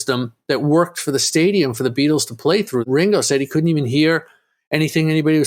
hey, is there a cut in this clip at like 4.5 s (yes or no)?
no